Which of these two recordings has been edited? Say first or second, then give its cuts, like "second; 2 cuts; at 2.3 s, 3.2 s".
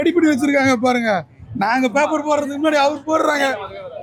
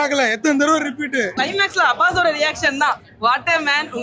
second; 1 cut; at 1.3 s